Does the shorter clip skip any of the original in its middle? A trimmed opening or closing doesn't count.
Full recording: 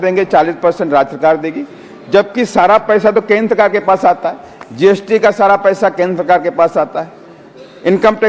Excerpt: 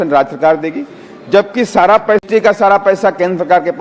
yes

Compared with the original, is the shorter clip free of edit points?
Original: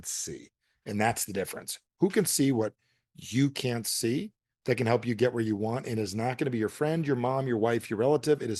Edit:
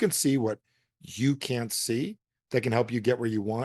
yes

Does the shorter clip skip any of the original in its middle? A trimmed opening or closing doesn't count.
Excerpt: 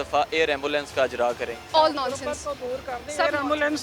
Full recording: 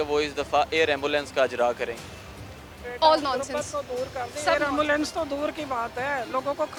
yes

